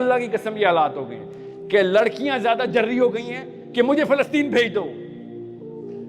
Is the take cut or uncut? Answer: cut